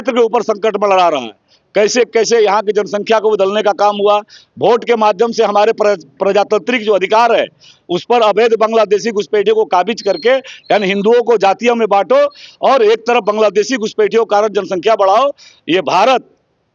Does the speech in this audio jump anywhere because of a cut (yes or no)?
no